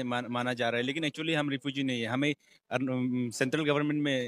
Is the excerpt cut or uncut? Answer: uncut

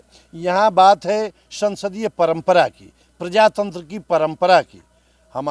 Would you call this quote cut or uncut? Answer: uncut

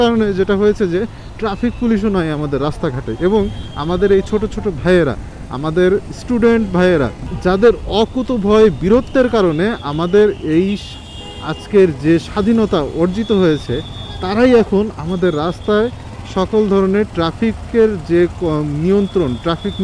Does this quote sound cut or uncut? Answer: uncut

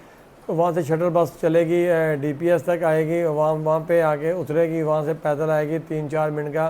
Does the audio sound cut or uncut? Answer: uncut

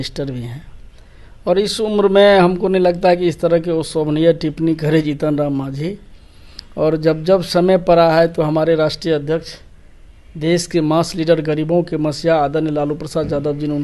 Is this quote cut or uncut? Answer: uncut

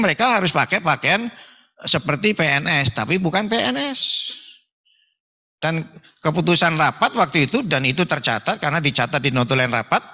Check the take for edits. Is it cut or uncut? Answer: uncut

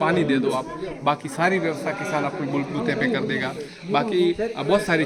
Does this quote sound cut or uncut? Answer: uncut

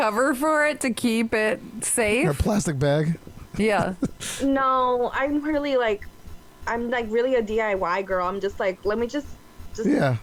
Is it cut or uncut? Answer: uncut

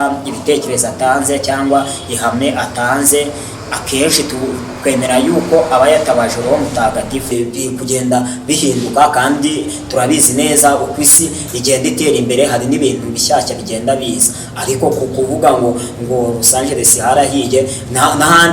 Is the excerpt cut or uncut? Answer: cut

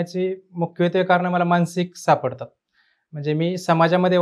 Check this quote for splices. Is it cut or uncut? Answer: uncut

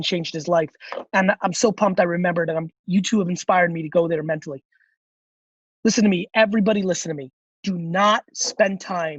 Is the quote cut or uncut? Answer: cut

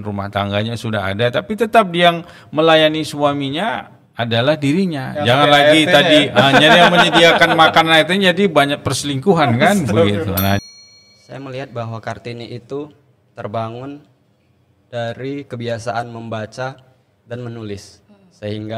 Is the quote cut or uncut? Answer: cut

